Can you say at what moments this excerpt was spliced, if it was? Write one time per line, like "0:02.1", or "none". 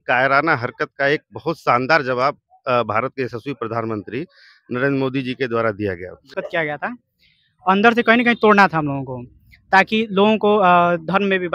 0:06.3

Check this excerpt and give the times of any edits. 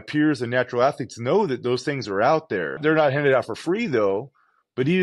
0:02.8

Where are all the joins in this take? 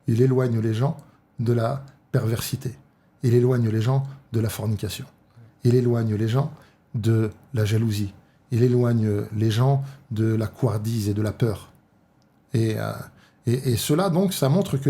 none

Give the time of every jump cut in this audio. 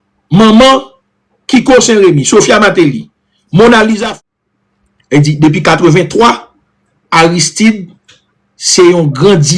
0:04.0

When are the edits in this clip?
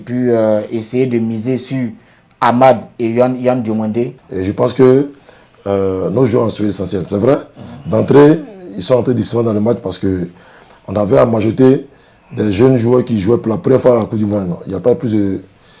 0:04.2

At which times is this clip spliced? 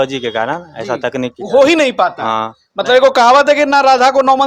none

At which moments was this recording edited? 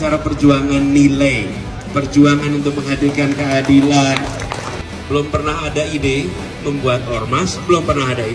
0:04.8

